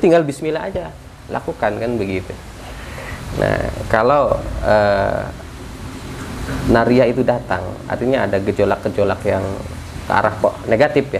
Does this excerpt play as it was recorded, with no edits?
yes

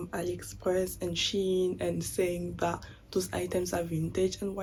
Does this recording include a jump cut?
no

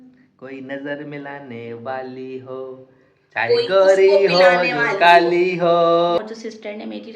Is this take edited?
yes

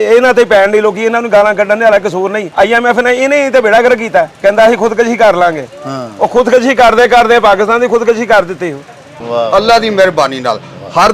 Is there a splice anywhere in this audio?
yes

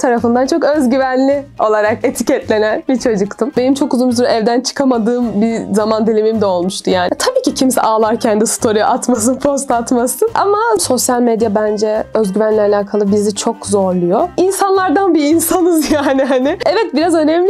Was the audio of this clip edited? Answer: yes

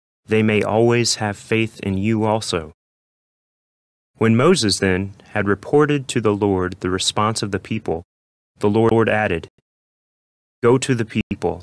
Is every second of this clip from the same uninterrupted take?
yes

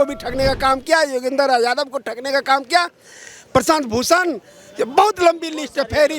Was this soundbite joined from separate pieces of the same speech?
no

